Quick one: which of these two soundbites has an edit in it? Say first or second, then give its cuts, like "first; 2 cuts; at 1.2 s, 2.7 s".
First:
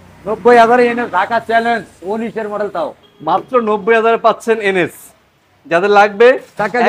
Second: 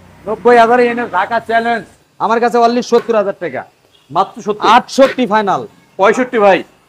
second; 1 cut; at 2.0 s